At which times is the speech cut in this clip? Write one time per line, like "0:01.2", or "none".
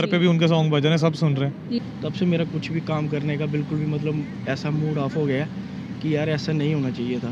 0:01.8